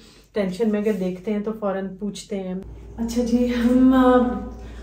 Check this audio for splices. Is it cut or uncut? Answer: cut